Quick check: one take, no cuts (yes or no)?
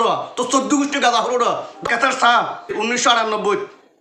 no